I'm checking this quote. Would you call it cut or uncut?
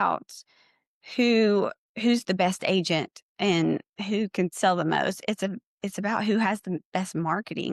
uncut